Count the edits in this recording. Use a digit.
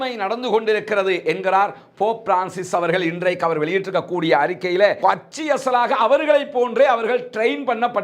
1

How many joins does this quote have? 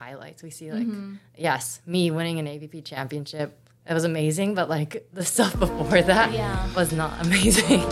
0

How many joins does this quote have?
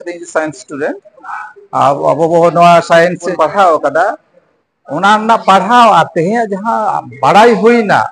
1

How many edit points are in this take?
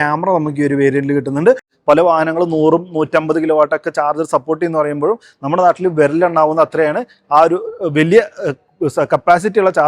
1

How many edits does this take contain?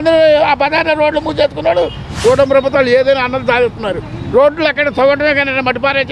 1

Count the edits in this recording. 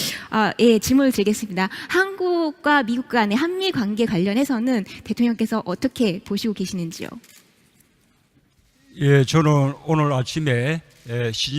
1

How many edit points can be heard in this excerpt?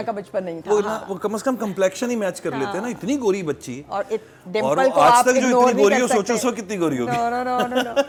0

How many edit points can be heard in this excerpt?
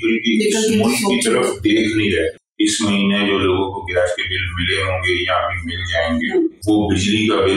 2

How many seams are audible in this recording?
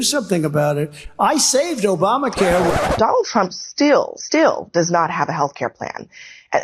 2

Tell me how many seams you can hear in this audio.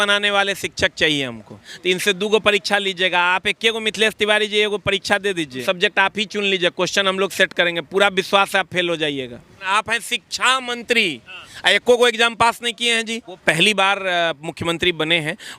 4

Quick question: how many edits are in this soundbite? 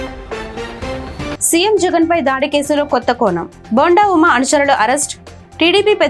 1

